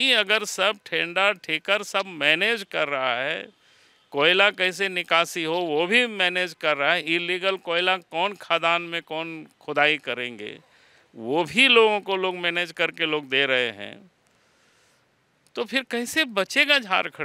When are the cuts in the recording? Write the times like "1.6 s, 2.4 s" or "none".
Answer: none